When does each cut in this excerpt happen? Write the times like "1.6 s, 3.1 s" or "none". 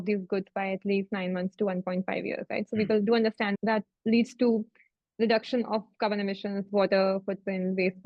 none

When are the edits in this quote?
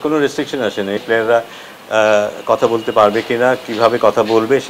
1.0 s

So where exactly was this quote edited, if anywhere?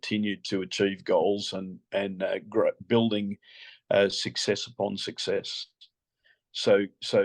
none

